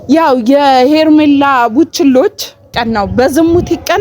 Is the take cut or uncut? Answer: cut